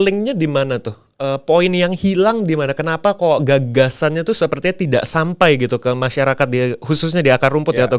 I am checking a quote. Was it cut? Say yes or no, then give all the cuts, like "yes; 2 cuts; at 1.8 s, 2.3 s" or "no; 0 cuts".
no; 0 cuts